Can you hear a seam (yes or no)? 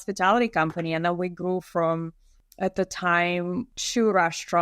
no